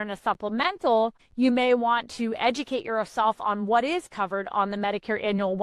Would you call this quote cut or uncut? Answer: cut